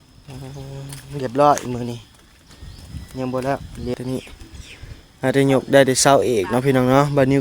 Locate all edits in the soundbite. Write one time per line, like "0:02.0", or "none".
0:03.9